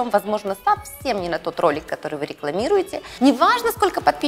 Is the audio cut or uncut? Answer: cut